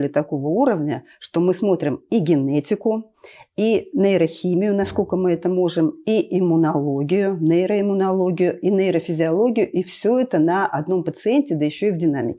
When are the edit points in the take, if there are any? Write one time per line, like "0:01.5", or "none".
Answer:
none